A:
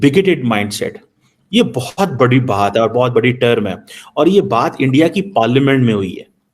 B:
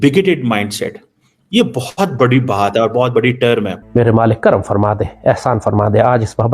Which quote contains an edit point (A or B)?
B